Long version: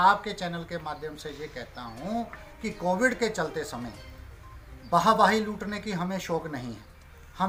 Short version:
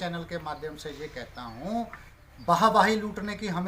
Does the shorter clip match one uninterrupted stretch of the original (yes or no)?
no